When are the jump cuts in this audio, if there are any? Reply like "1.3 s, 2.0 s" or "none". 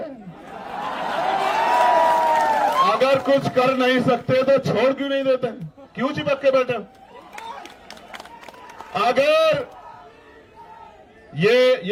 none